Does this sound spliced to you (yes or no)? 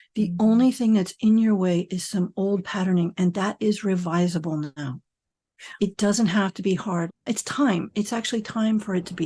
yes